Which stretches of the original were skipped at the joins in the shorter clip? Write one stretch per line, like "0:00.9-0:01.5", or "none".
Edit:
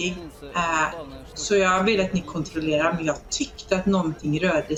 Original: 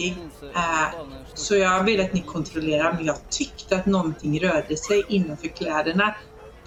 none